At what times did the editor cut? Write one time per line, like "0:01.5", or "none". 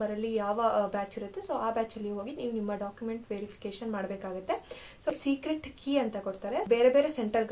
0:05.1
0:06.6

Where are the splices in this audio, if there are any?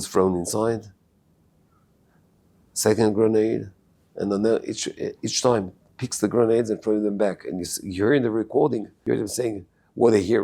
0:08.9

